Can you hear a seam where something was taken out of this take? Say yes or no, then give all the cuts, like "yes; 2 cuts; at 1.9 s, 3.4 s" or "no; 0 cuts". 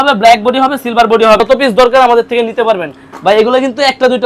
yes; 1 cut; at 1.4 s